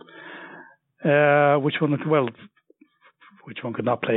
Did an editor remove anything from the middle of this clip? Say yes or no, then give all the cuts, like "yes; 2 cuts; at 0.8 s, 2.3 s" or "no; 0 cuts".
no; 0 cuts